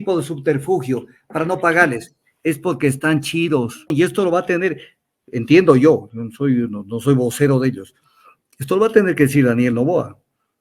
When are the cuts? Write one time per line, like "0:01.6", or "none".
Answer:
0:03.9